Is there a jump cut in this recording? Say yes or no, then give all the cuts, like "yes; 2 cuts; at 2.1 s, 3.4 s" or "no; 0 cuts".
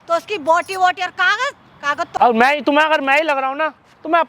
yes; 1 cut; at 2.2 s